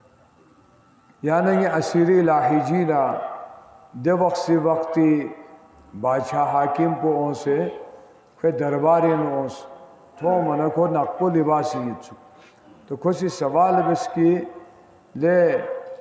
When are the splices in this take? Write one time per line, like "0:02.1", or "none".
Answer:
0:10.1